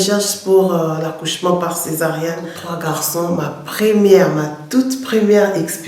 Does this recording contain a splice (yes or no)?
yes